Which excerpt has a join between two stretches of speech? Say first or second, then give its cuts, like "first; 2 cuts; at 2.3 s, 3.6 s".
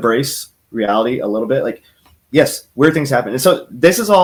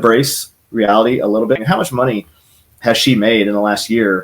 second; 1 cut; at 1.6 s